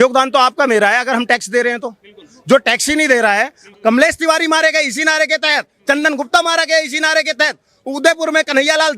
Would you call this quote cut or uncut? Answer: cut